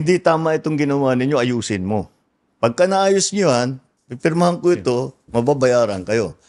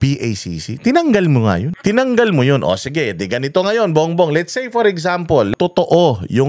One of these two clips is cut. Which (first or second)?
second